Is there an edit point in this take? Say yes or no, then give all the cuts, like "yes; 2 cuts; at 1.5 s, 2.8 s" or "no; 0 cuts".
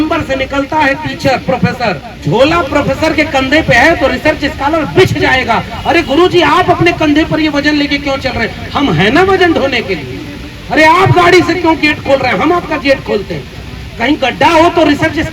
yes; 1 cut; at 2.1 s